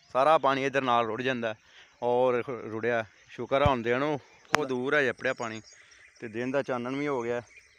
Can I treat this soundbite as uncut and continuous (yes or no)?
no